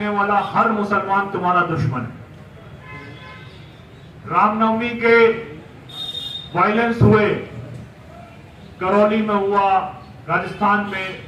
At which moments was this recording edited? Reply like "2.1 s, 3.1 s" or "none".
none